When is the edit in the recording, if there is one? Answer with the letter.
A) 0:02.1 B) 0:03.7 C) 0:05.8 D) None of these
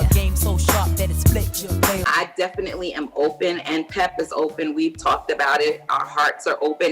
A